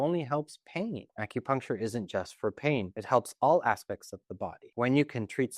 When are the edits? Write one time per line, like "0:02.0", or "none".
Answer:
0:01.1
0:02.9
0:04.6